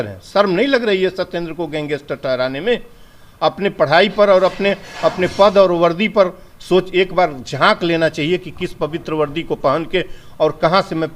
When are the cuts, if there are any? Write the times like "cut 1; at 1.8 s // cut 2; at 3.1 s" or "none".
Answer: none